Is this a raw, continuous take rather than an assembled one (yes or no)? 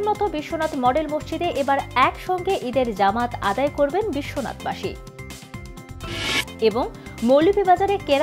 yes